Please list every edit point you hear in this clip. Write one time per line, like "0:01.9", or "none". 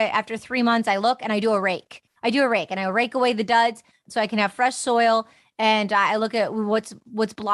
0:04.0

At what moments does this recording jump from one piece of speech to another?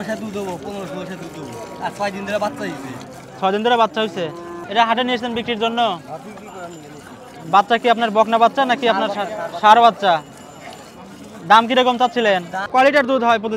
0:04.5
0:12.6

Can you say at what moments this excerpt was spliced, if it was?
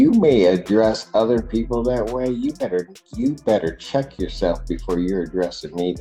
none

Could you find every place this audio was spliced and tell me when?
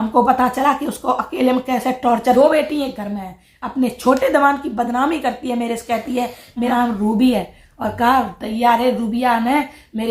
0:02.4
0:06.7

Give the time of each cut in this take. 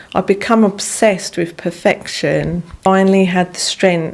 0:02.9

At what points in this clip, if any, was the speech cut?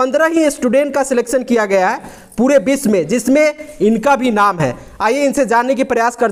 none

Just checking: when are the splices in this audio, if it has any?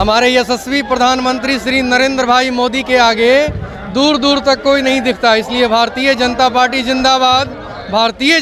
none

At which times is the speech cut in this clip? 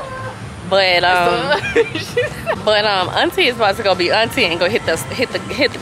0:02.6

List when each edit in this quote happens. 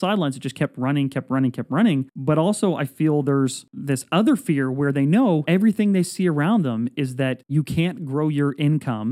0:02.1
0:03.7
0:05.4
0:07.4

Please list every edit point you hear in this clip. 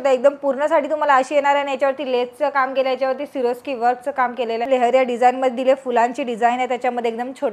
0:04.6

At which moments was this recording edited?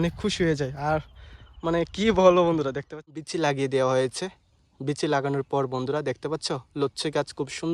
0:03.1

